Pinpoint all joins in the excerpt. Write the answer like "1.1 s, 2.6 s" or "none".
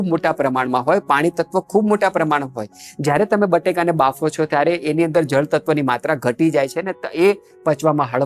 none